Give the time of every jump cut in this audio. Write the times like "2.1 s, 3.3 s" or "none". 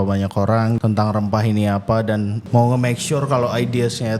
0.8 s, 2.4 s